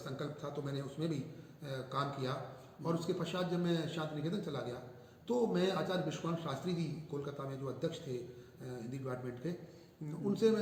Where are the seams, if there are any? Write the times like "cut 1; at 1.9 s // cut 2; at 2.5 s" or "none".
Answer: none